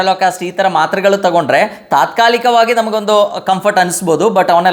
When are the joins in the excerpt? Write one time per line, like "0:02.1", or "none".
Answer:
none